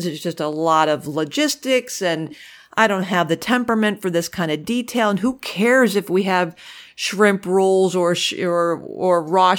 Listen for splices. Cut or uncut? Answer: uncut